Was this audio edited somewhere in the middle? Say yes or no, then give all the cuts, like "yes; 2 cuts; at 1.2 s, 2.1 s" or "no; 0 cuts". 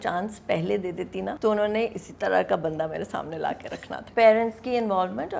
yes; 2 cuts; at 1.3 s, 4.0 s